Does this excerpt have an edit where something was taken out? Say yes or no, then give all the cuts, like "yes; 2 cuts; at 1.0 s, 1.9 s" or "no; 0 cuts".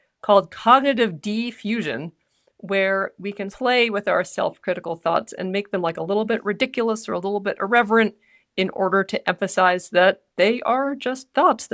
yes; 1 cut; at 3.4 s